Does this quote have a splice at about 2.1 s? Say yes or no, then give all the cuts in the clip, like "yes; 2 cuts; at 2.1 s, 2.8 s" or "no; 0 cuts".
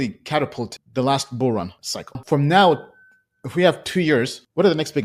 yes; 1 cut; at 2.1 s